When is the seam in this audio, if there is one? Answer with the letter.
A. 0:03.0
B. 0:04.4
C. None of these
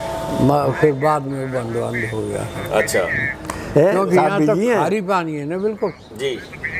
C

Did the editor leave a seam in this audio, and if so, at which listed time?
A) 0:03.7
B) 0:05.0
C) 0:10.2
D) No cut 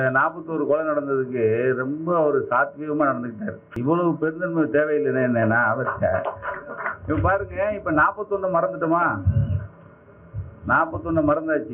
A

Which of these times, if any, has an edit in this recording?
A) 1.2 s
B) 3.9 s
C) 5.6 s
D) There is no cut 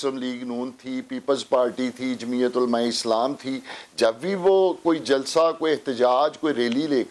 D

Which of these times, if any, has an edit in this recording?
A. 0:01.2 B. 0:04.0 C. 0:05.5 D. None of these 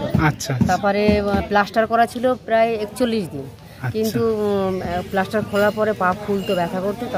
D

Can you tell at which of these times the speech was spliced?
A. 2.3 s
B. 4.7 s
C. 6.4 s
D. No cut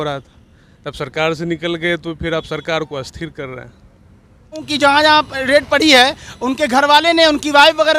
B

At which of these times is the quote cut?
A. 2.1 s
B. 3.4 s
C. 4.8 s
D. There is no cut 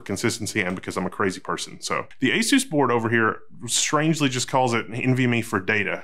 A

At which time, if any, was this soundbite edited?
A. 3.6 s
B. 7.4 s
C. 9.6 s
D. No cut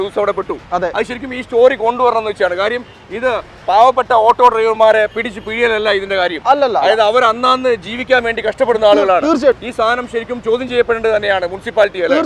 C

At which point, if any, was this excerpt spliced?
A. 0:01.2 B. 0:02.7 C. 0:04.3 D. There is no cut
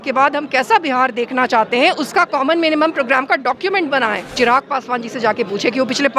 C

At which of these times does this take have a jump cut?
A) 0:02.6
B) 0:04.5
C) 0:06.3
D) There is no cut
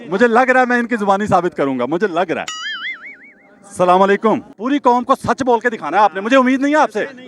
B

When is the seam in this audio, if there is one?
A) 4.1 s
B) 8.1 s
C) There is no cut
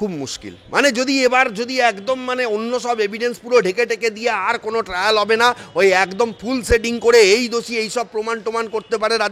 C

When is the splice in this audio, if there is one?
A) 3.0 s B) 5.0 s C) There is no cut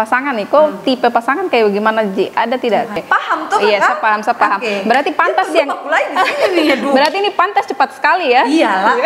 A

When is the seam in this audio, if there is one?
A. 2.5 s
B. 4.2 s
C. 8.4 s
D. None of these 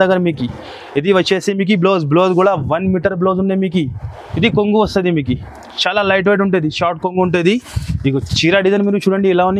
B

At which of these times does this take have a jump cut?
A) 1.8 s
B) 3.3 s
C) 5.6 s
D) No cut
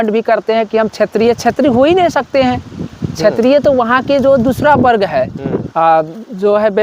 C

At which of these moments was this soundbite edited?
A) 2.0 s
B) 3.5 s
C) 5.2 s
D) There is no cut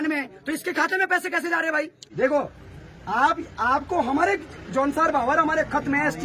A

